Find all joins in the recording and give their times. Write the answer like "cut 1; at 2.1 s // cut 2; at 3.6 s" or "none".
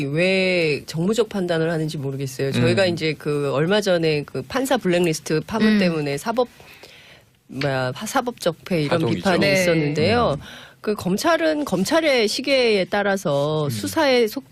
cut 1; at 6.5 s